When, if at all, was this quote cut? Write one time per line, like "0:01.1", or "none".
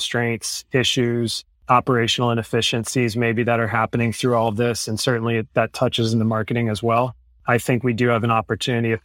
none